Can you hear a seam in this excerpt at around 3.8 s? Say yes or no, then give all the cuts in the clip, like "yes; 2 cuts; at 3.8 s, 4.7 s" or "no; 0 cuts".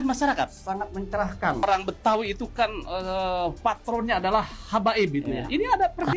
no; 1 cut; at 1.6 s